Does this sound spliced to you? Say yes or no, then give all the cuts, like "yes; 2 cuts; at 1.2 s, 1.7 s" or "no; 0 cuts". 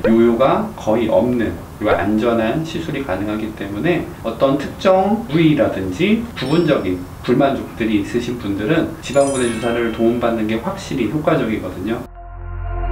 yes; 5 cuts; at 1.7 s, 4.1 s, 6.3 s, 9.0 s, 12.1 s